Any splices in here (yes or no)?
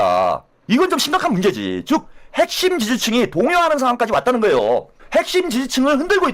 yes